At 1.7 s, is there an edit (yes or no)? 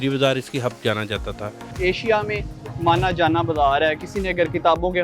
yes